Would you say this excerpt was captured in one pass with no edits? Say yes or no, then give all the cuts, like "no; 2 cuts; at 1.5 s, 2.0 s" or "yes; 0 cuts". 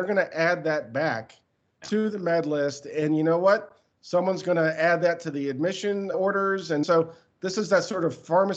no; 1 cut; at 6.8 s